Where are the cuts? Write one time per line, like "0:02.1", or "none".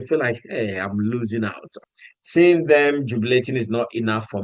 0:01.8